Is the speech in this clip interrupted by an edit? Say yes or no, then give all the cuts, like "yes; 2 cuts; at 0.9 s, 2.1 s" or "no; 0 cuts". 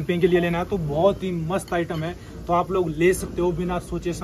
no; 0 cuts